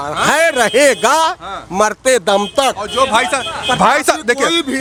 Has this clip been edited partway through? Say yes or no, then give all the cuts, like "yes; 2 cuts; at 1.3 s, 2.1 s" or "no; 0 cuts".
no; 0 cuts